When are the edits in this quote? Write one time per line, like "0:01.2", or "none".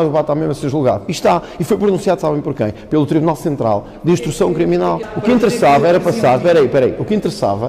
0:05.0